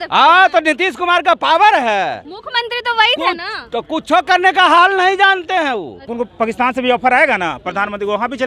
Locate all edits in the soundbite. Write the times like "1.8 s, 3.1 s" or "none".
6.1 s